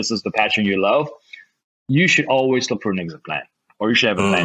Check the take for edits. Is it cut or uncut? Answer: uncut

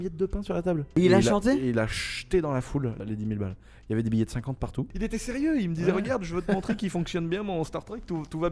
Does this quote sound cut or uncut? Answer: cut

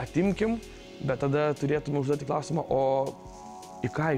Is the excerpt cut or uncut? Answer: uncut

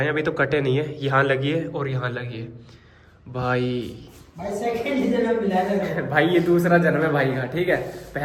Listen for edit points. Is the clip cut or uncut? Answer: uncut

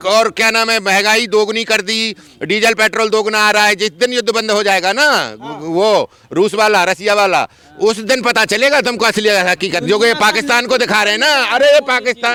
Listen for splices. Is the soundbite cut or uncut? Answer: uncut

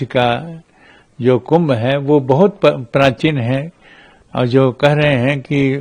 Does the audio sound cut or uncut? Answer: uncut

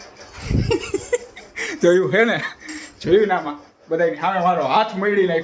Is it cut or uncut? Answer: uncut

